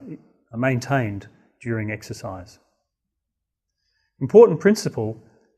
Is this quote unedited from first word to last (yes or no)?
no